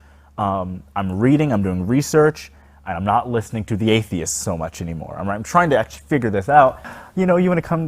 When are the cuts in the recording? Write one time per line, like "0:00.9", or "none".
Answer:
0:07.0